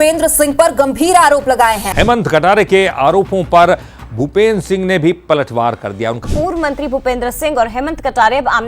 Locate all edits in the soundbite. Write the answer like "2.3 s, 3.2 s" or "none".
6.2 s